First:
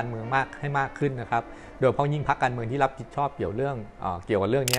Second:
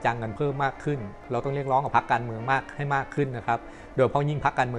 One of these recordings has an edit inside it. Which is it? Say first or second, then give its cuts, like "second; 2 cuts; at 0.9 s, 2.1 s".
second; 1 cut; at 1.3 s